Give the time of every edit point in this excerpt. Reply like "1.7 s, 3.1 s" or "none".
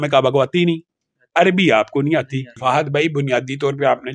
2.5 s

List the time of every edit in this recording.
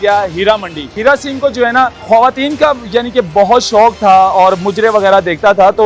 0.9 s, 2.0 s

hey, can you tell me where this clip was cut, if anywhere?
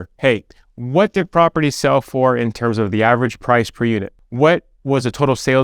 4.2 s

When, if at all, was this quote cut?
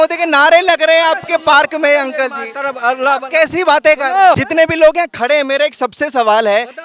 4.4 s

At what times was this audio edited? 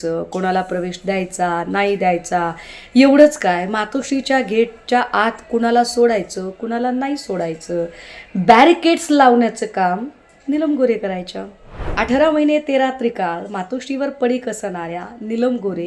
11.9 s

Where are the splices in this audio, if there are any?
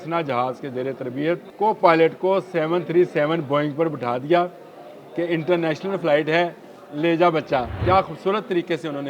1.5 s, 7.7 s

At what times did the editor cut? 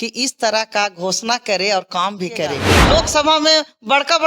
2.7 s

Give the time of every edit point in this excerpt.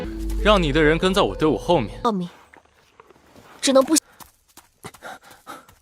2.0 s

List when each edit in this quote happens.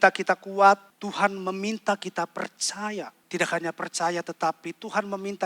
0.9 s, 3.2 s

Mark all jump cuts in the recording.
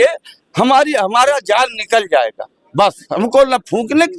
none

